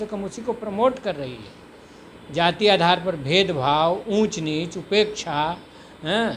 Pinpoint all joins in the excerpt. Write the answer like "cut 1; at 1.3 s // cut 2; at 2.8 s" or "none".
none